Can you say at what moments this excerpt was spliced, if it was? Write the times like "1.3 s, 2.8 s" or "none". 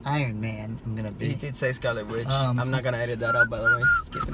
2.6 s